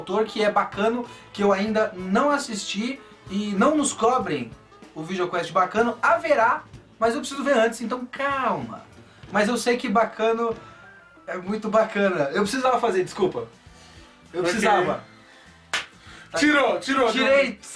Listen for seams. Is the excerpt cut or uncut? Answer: cut